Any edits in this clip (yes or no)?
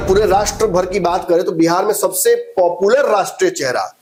no